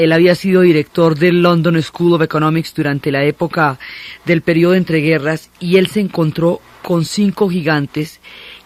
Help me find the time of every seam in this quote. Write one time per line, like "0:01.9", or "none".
none